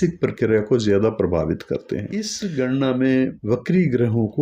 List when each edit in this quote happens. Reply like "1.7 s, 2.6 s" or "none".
2.0 s